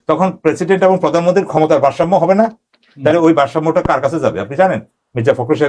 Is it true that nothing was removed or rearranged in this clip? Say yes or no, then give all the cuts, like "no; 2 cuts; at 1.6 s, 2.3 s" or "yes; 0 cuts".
yes; 0 cuts